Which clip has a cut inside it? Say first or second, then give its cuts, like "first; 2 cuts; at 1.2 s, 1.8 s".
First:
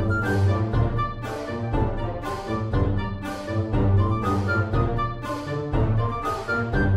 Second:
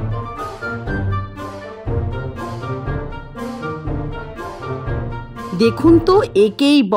second; 1 cut; at 5.5 s